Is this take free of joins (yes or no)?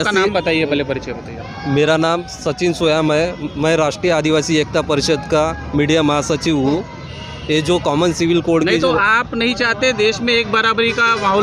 yes